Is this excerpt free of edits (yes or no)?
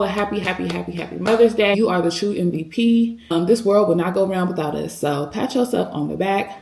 no